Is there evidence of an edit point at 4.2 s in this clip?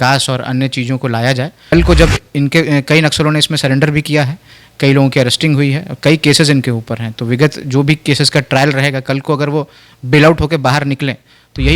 no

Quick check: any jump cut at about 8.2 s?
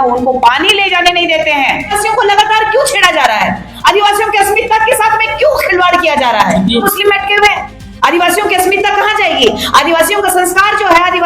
no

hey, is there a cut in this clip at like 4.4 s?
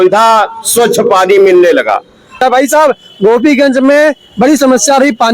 no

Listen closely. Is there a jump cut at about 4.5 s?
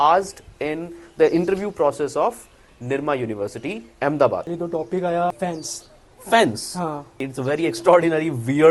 yes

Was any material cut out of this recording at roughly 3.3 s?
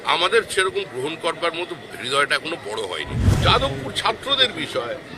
yes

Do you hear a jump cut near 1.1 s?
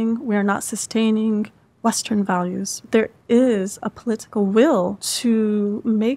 no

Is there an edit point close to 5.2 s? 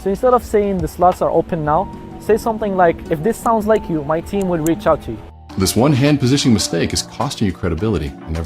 yes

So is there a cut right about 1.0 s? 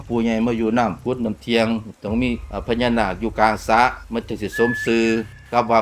yes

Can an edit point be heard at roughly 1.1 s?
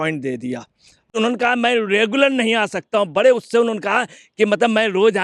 yes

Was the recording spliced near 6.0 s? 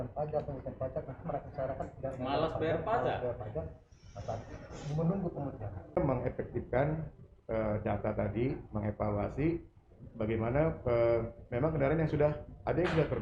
yes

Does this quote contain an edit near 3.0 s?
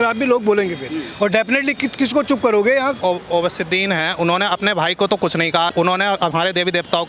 yes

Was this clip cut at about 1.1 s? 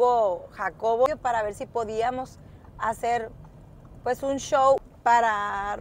yes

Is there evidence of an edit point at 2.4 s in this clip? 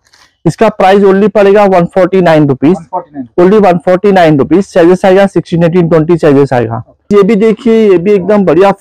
no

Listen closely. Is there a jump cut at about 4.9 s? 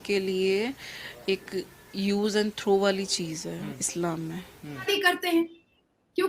yes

